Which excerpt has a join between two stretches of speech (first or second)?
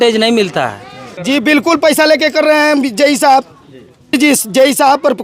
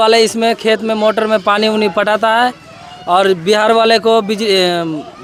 first